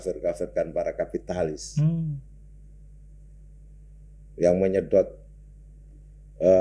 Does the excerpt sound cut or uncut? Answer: uncut